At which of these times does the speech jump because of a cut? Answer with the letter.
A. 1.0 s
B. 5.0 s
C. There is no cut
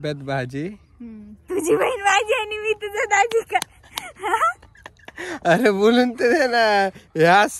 B